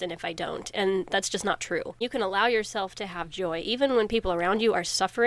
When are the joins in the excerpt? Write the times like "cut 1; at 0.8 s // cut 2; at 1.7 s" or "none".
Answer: cut 1; at 2.0 s

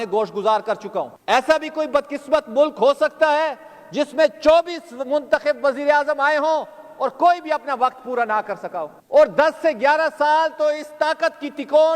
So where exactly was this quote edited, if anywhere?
cut 1; at 1.2 s // cut 2; at 9.0 s

